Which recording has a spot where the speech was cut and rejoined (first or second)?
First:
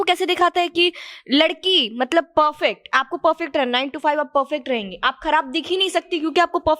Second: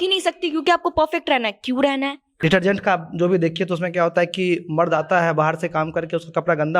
second